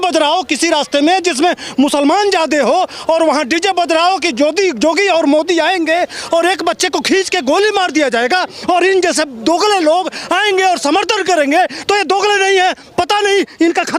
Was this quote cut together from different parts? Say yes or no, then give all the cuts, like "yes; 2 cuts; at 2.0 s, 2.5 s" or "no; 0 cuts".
no; 0 cuts